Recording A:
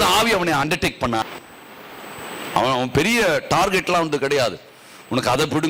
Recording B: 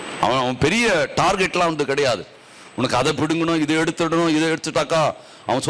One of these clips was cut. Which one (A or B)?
A